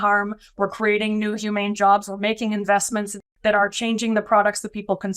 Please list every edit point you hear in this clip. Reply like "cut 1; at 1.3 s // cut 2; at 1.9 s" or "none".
cut 1; at 3.3 s